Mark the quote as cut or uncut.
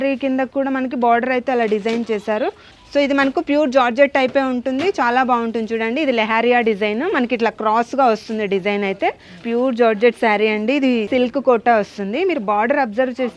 cut